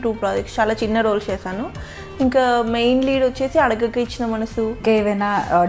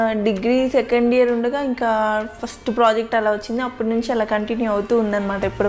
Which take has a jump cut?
first; 1 cut; at 4.8 s

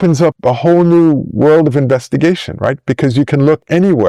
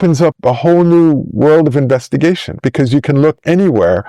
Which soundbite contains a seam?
second; 1 cut; at 2.5 s

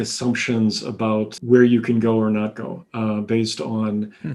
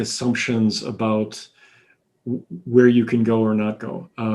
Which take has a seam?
first; 1 cut; at 1.4 s

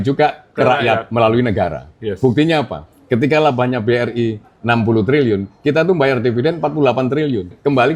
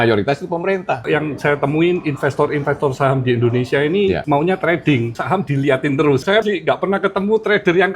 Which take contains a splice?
second; 4 cuts; at 1.0 s, 4.2 s, 5.2 s, 6.4 s

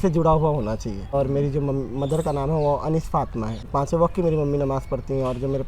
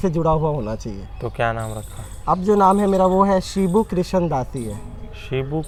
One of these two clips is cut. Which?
first; 2 cuts; at 1.1 s, 3.6 s

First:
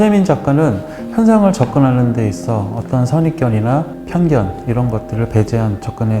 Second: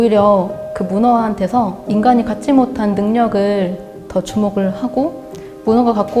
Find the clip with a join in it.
first; 1 cut; at 4.0 s

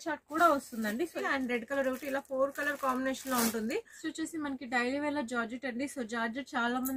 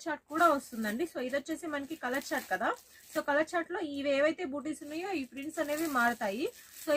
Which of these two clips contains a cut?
first; 2 cuts; at 1.2 s, 4.0 s

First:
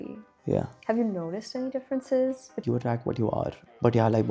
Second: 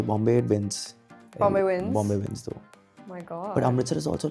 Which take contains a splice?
first; 1 cut; at 2.6 s

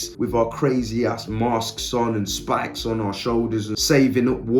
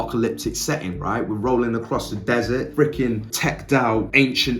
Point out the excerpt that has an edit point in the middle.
second; 1 cut; at 2.7 s

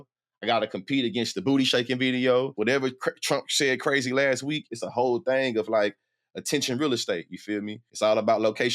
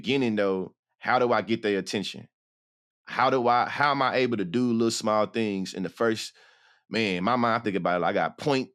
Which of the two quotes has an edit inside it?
first; 3 cuts; at 2.5 s, 4.8 s, 7.8 s

